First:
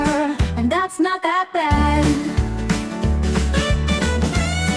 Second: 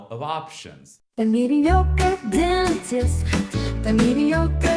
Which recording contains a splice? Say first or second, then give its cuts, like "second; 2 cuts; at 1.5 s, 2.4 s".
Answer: second; 1 cut; at 0.9 s